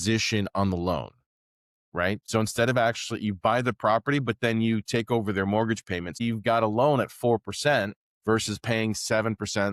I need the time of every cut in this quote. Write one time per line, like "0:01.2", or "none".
0:02.2
0:06.2